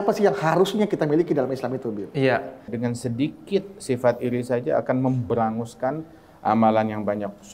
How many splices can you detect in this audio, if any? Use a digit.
1